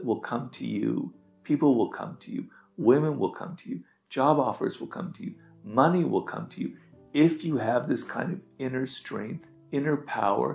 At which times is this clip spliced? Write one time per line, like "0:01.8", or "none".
0:09.5